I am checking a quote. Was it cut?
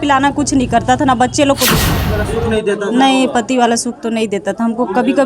yes; 1 cut; at 1.9 s

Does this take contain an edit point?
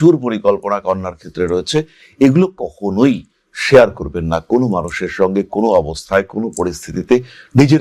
no; 0 cuts

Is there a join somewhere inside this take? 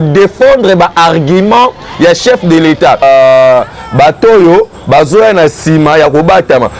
yes; 1 cut; at 3.0 s

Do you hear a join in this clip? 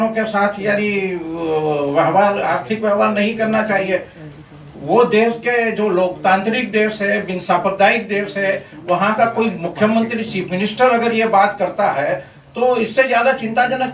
no; 0 cuts

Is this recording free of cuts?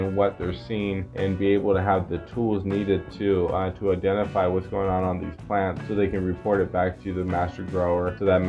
yes; 0 cuts

